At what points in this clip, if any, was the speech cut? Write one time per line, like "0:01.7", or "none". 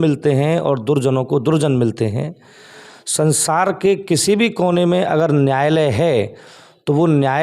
none